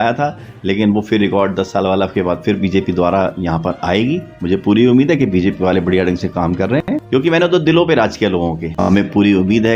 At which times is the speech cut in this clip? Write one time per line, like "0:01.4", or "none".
0:06.8
0:08.7